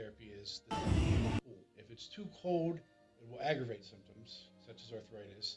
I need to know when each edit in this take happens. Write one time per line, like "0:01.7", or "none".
none